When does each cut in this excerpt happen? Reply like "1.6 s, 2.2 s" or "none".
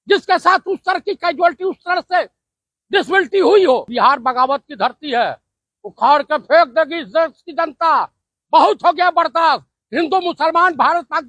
3.9 s